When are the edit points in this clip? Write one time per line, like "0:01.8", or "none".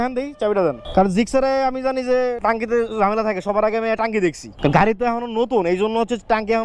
none